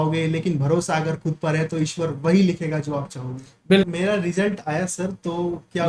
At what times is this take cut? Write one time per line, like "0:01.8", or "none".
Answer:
0:03.9